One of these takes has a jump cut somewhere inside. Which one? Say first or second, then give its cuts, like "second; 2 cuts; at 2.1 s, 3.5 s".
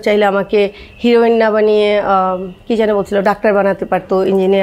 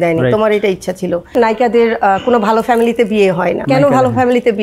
second; 2 cuts; at 1.3 s, 3.6 s